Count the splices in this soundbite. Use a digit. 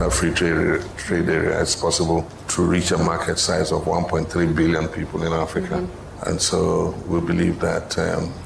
2